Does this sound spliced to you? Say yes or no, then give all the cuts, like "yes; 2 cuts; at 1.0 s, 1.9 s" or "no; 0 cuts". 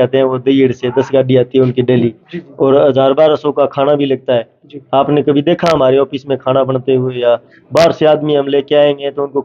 no; 0 cuts